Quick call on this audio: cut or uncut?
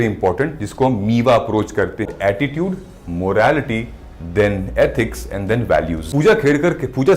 cut